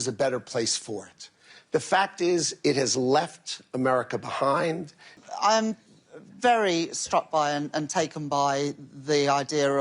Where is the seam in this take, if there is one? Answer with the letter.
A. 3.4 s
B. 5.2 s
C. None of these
B